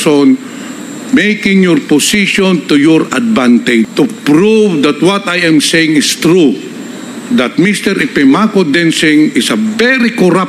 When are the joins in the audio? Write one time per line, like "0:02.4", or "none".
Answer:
0:03.9

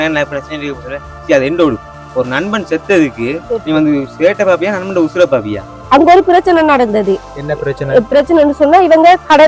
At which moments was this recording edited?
0:05.7

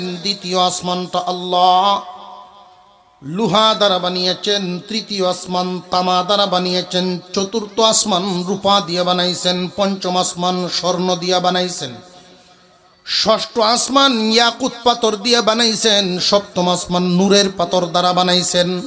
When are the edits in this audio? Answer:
none

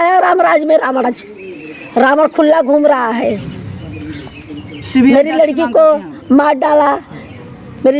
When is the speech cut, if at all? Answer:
0:01.0

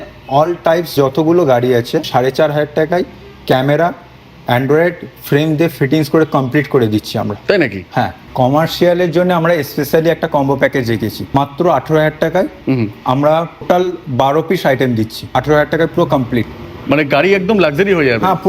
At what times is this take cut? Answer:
0:00.9
0:02.1
0:08.2
0:11.3
0:13.6
0:15.3

